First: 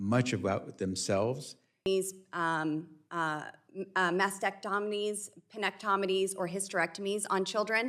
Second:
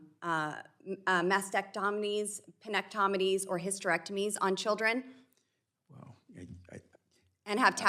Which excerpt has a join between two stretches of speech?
first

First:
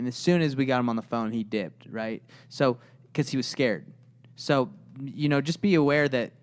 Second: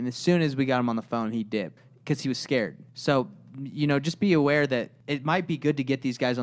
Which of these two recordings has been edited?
second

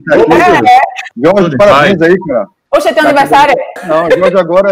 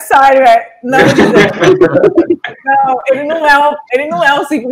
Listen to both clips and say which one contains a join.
first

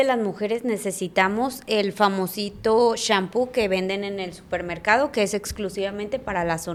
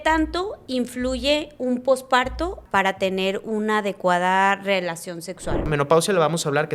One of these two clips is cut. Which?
second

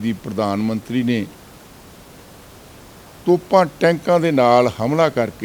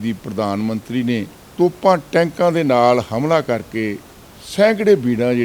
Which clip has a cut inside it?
second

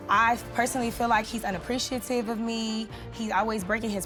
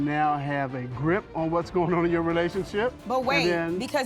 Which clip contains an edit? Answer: second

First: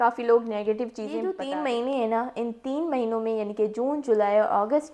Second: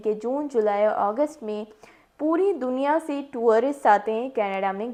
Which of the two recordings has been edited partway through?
first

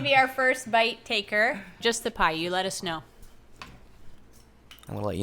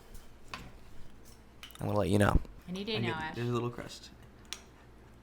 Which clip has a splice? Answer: first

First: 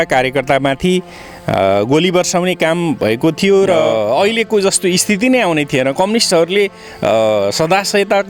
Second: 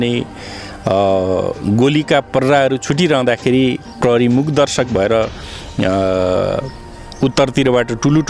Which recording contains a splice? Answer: first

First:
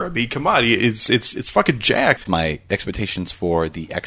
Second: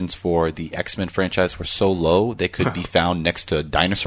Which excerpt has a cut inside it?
first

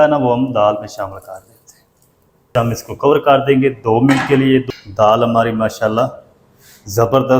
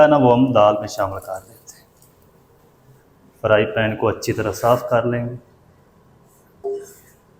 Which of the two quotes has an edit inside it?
first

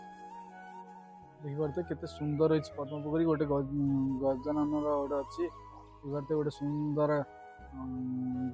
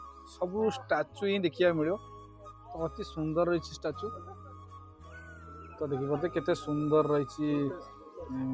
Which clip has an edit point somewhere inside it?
first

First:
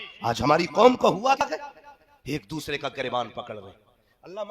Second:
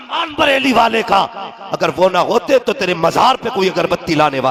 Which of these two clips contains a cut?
first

